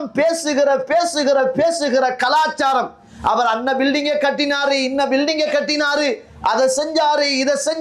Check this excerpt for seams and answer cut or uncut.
uncut